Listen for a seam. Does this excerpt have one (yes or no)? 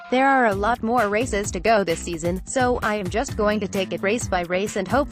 no